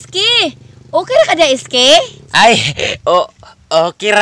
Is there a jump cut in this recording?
no; 0 cuts

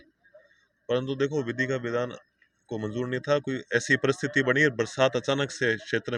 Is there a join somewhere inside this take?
no; 0 cuts

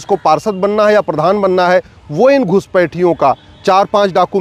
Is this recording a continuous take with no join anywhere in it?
yes; 0 cuts

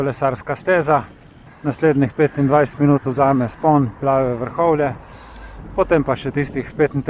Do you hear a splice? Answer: no; 0 cuts

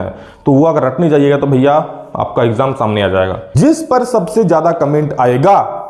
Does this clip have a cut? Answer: yes; 1 cut; at 3.4 s

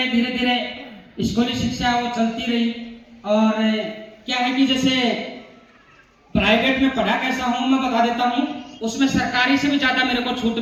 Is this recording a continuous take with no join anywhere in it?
yes; 0 cuts

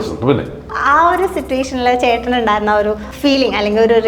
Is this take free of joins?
no; 1 cut; at 3.1 s

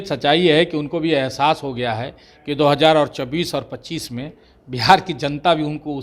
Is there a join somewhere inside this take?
no; 0 cuts

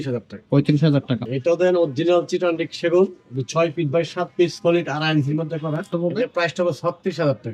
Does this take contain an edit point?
yes; 2 cuts; at 1.3 s, 5.9 s

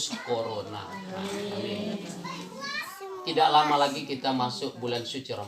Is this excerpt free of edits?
no; 1 cut; at 2.8 s

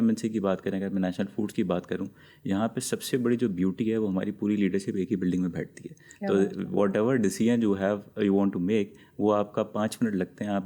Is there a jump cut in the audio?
no; 0 cuts

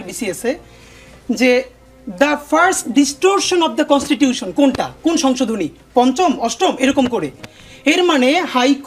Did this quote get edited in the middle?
no; 0 cuts

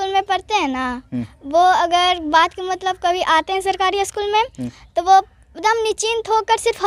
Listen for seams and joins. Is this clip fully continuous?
yes; 0 cuts

